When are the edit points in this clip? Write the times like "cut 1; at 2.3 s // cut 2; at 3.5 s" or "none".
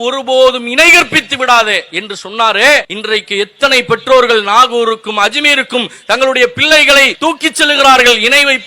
cut 1; at 2.9 s // cut 2; at 7.1 s

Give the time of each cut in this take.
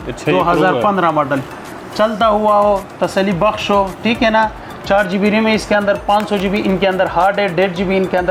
none

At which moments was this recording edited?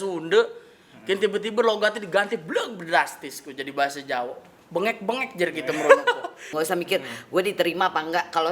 cut 1; at 6.5 s

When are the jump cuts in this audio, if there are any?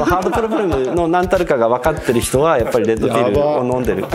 none

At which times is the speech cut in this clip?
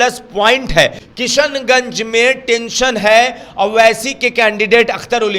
cut 1; at 1.0 s

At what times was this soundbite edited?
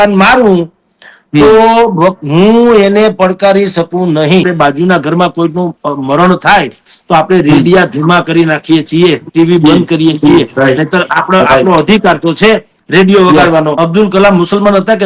cut 1; at 4.4 s // cut 2; at 13.7 s

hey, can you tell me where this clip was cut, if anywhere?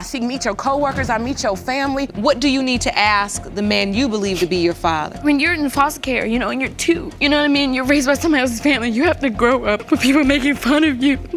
cut 1; at 2.1 s // cut 2; at 5.1 s

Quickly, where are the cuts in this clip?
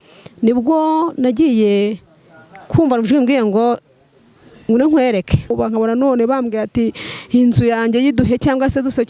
cut 1; at 5.5 s

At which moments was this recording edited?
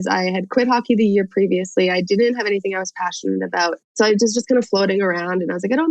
none

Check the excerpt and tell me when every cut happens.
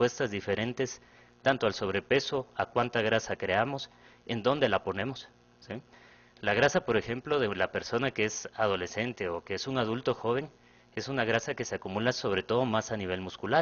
cut 1; at 3.9 s

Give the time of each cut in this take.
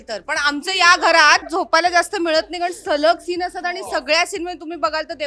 cut 1; at 1.5 s

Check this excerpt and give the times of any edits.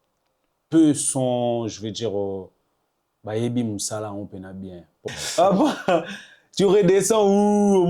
cut 1; at 5.1 s

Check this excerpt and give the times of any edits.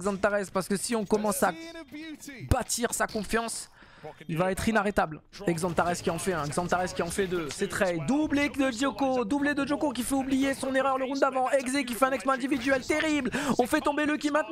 cut 1; at 5.3 s

